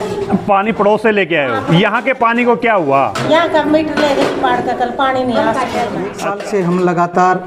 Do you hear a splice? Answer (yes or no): yes